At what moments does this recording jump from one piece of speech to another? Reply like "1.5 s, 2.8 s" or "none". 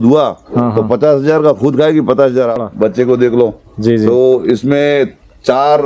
2.6 s